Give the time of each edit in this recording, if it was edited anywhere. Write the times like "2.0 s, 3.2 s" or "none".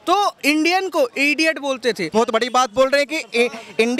2.1 s